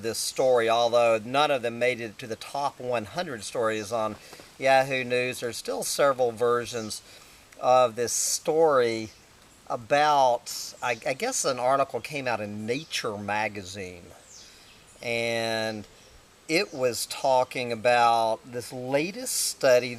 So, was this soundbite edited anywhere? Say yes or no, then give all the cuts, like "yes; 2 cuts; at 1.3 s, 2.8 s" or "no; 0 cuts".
yes; 1 cut; at 12.4 s